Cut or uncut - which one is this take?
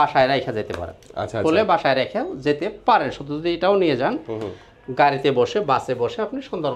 uncut